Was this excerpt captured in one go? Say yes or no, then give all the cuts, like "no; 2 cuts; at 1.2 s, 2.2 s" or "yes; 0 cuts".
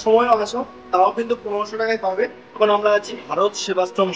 no; 1 cut; at 2.4 s